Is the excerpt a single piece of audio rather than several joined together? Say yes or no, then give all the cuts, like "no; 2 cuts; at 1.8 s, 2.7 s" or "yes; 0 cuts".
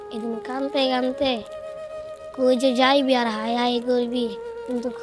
yes; 0 cuts